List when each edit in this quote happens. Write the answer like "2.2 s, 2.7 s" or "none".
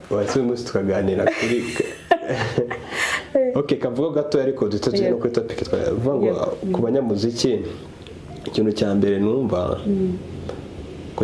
none